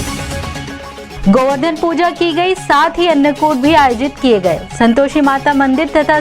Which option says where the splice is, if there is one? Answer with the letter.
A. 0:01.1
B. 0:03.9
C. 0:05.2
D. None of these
A